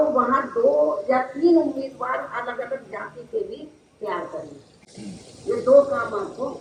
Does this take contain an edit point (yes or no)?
no